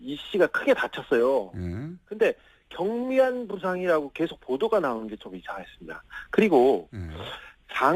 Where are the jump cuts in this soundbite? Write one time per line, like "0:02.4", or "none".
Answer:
0:06.8